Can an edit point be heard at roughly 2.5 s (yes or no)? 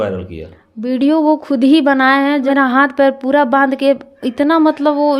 yes